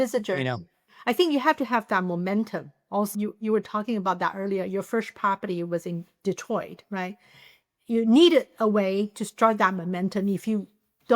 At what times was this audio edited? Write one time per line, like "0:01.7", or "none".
0:00.9